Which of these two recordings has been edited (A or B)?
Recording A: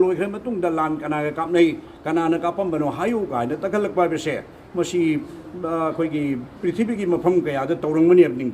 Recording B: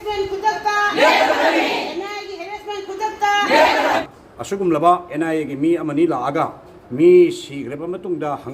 B